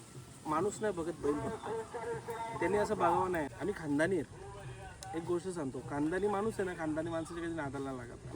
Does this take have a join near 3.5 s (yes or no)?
yes